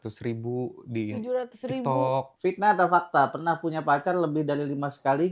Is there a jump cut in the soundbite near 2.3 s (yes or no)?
yes